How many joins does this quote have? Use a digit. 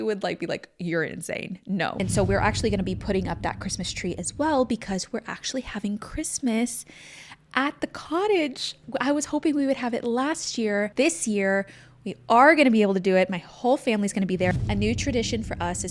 4